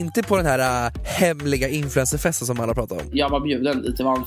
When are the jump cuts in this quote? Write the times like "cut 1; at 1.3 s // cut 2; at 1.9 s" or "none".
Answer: cut 1; at 1.0 s // cut 2; at 3.1 s